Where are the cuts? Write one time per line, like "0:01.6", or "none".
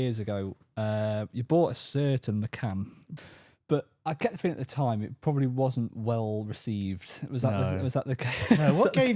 0:03.0